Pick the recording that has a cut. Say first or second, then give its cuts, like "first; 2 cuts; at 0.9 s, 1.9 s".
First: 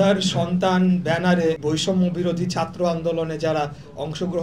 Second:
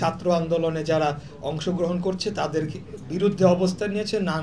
first; 1 cut; at 1.6 s